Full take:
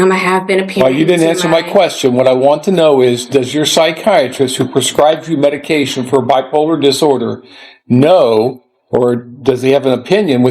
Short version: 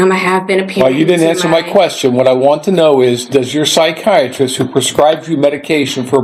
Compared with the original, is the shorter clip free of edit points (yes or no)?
yes